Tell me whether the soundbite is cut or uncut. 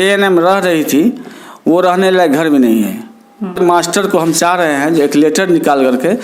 cut